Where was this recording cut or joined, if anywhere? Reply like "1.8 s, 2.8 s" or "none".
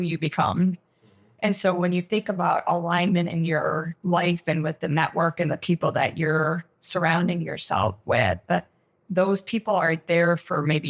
none